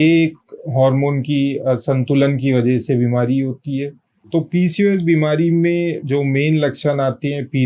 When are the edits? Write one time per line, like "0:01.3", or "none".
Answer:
0:04.2